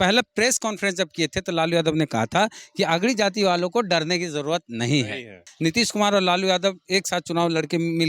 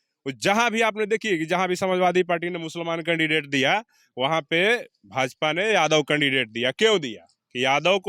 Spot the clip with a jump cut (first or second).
first